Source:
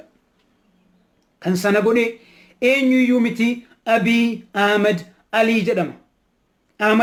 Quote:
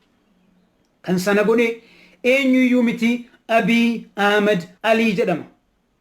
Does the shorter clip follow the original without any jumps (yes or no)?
no